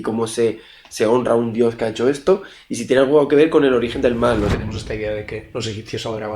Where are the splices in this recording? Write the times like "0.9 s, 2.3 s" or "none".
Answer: 4.6 s, 5.5 s